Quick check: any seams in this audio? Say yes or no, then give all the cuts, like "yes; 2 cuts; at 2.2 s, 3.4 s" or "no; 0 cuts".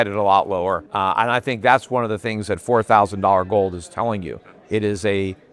no; 0 cuts